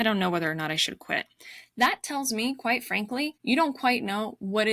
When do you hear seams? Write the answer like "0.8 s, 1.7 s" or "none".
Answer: 3.4 s